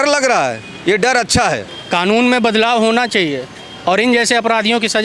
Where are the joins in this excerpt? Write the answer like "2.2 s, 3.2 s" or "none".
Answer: 1.7 s